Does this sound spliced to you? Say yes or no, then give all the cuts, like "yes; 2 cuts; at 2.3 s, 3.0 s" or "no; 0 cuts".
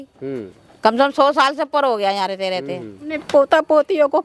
yes; 1 cut; at 3.1 s